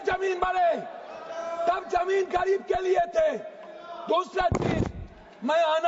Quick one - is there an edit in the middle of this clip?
no; 0 cuts

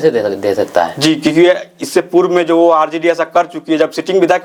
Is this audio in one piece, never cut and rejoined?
yes; 0 cuts

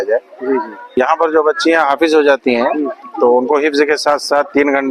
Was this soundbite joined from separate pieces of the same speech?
yes; 1 cut; at 1.0 s

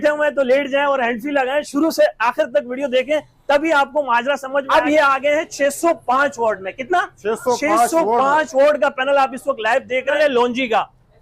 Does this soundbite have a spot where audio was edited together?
yes; 2 cuts; at 4.7 s, 10.2 s

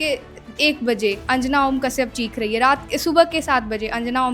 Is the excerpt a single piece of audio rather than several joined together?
yes; 0 cuts

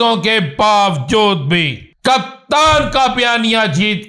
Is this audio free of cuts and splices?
no; 1 cut; at 1.8 s

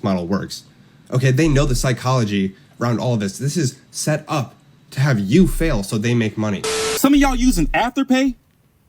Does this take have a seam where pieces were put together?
yes; 1 cut; at 6.8 s

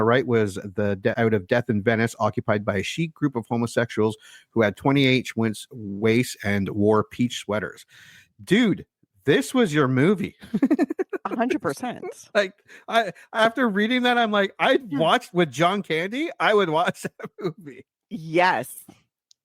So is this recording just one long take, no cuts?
yes; 0 cuts

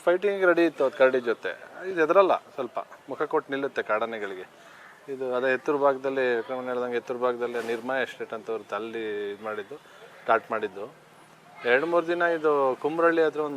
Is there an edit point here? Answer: no; 0 cuts

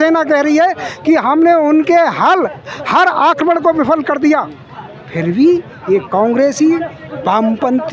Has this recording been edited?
no; 0 cuts

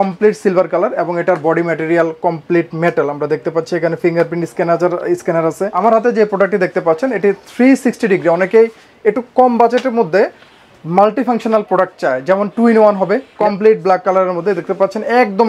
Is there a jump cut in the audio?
yes; 2 cuts; at 5.7 s, 13.3 s

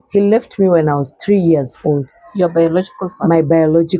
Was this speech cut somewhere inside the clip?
no; 0 cuts

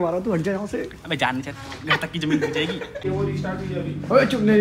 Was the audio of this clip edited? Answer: yes; 1 cut; at 3.0 s

